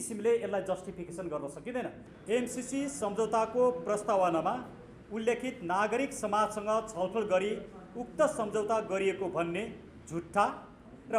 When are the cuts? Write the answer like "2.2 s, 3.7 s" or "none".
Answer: 2.1 s